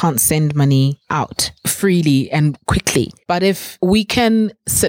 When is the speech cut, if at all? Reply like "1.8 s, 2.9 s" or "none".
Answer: 1.1 s, 3.5 s